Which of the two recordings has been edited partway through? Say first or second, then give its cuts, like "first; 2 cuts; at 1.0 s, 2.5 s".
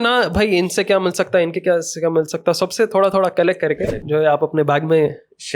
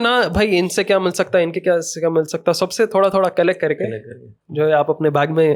first; 1 cut; at 3.9 s